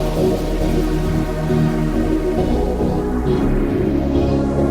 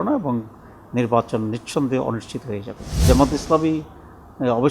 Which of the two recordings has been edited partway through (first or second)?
second